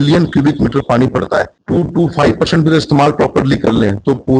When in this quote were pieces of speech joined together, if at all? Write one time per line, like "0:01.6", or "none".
0:01.6

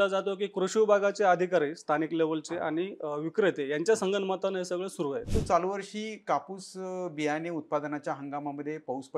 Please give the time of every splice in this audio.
0:05.3

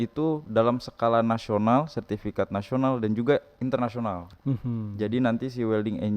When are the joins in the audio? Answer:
0:04.3

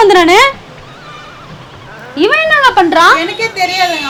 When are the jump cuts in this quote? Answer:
none

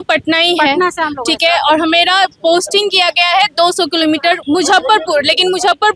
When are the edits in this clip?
0:04.4

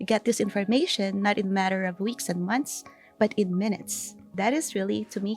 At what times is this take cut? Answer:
0:04.3

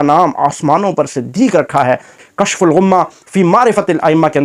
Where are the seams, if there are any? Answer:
0:02.2

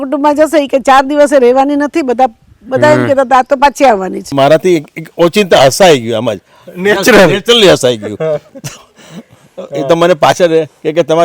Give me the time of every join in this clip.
0:04.2

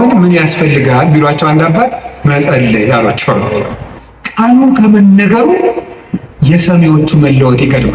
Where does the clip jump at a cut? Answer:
0:03.8

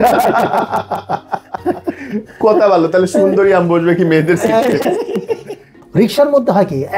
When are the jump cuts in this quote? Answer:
none

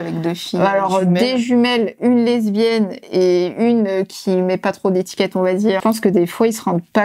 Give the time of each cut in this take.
0:05.8

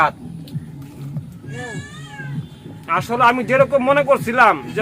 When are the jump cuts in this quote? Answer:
0:01.5

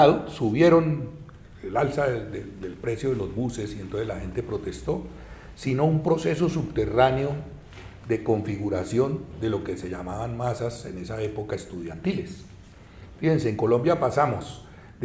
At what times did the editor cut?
0:11.0

